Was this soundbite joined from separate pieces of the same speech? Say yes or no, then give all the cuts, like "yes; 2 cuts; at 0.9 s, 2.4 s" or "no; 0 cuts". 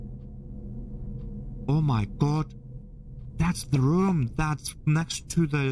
no; 0 cuts